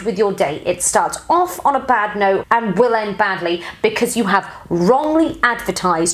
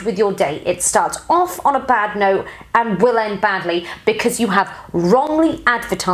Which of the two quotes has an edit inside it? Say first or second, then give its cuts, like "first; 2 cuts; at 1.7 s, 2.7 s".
first; 1 cut; at 2.4 s